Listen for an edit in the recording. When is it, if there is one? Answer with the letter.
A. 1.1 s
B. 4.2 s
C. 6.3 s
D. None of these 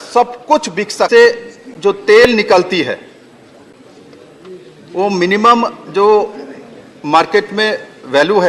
A